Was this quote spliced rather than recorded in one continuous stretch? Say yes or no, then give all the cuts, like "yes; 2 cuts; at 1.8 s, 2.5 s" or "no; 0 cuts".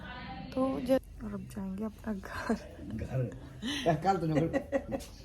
yes; 1 cut; at 1.0 s